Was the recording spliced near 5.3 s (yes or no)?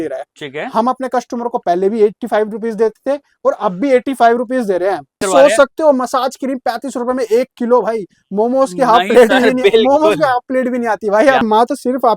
yes